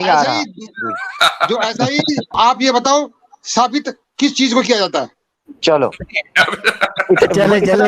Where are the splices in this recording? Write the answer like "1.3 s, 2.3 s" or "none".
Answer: 2.3 s, 4.0 s

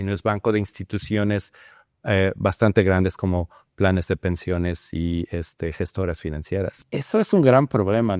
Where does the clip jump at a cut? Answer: 6.8 s

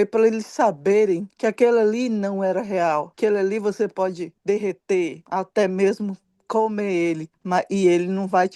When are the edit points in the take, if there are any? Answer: 1.3 s, 3.1 s, 4.3 s, 5.2 s, 7.3 s

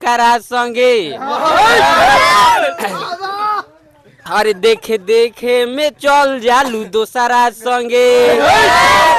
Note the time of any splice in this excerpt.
none

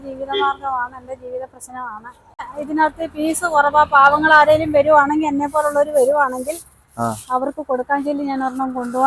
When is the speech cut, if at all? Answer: 2.5 s

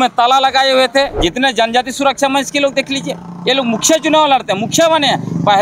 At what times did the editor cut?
1.1 s

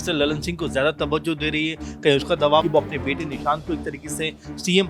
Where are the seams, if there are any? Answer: 2.7 s

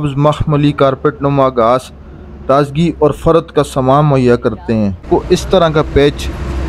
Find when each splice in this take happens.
5.0 s

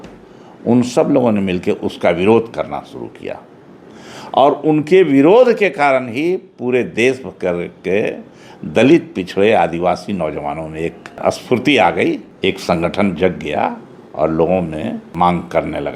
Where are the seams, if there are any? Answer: 11.2 s, 12.3 s, 15.1 s

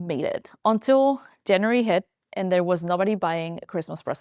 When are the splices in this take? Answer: none

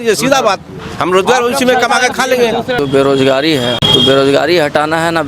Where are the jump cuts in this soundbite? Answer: 2.8 s, 3.8 s

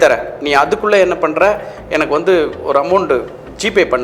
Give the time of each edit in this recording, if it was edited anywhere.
none

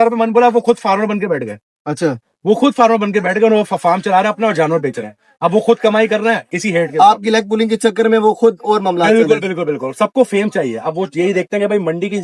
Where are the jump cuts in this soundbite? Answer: none

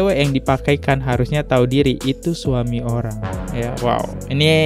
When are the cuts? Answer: 3.4 s

